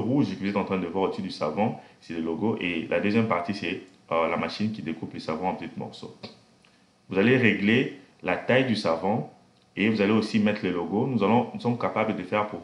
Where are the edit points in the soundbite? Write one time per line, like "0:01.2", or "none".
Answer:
none